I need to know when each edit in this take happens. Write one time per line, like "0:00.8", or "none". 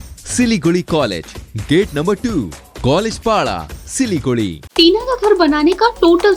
0:04.6